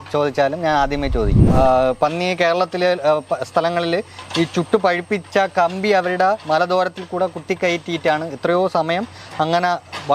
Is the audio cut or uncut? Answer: cut